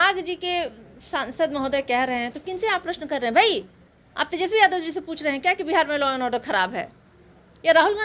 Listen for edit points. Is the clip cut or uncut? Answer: uncut